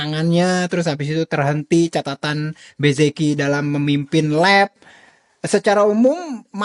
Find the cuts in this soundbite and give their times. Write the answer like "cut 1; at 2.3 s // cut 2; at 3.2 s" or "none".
none